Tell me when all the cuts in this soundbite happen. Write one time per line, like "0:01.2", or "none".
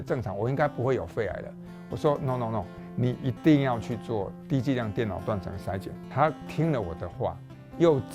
none